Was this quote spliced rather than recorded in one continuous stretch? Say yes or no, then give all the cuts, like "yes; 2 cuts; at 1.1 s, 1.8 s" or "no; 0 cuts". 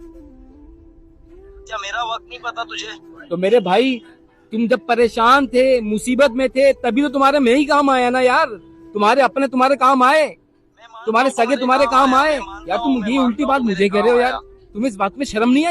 yes; 1 cut; at 1.5 s